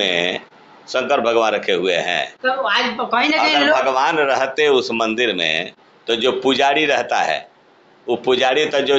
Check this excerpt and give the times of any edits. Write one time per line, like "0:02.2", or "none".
none